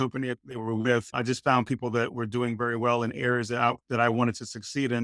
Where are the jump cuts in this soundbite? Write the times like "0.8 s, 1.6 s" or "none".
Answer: 1.1 s